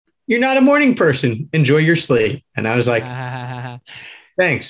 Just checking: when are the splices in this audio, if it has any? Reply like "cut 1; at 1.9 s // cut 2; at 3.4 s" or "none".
none